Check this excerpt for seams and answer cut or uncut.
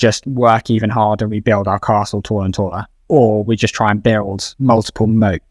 uncut